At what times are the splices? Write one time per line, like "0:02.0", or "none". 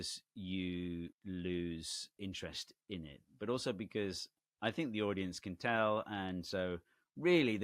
0:01.2
0:02.1